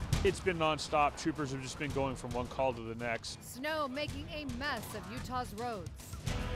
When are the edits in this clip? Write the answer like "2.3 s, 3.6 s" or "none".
none